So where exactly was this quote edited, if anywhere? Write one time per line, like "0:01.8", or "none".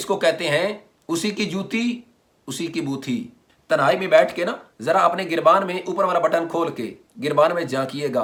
none